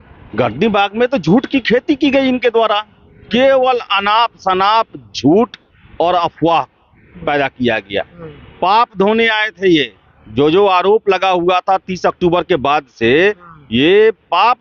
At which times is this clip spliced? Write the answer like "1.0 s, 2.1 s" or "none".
none